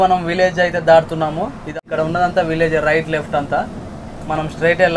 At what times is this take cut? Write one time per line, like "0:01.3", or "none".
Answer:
0:01.7